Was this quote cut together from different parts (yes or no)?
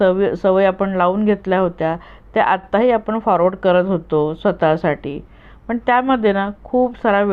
no